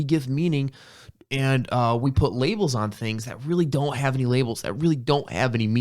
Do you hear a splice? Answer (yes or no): no